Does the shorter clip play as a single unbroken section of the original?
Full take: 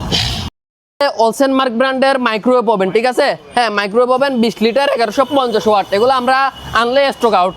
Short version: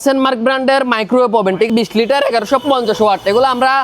no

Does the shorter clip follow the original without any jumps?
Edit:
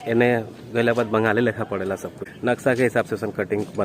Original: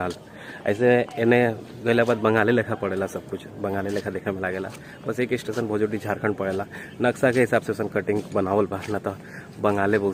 no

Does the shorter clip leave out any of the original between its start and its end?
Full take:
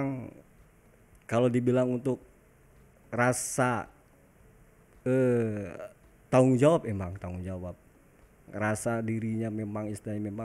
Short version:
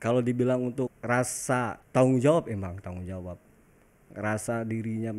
yes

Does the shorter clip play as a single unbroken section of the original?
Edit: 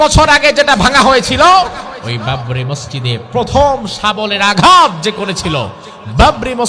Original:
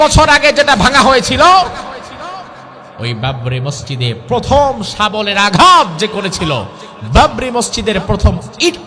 no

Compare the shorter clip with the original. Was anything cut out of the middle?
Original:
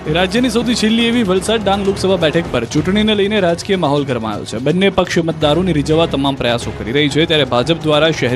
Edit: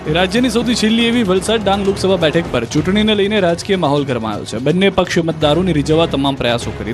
no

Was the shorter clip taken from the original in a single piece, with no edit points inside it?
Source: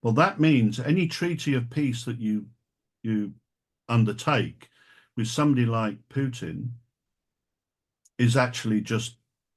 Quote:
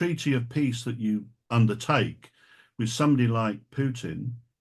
no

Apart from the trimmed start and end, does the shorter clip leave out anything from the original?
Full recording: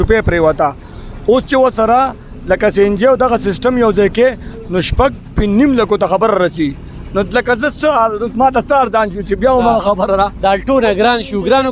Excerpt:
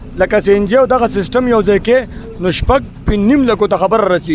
no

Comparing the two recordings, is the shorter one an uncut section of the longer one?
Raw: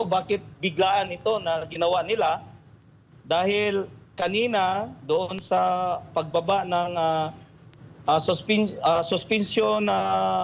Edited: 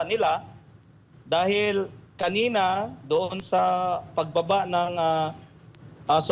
yes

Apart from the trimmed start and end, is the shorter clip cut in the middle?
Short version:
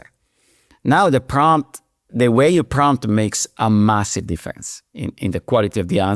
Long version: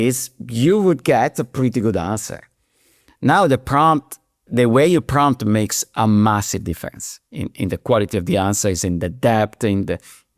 no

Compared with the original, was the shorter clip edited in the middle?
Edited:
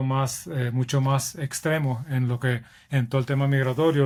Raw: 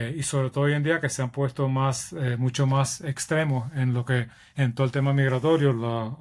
no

